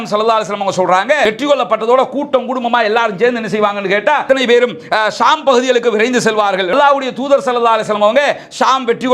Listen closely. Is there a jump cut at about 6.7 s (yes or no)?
yes